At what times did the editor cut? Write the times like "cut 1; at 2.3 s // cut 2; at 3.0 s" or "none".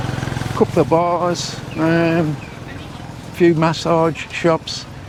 none